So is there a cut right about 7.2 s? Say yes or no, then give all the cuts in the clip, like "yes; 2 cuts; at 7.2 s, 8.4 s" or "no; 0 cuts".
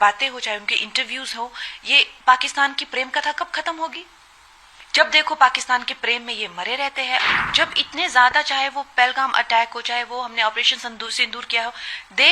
yes; 1 cut; at 7.2 s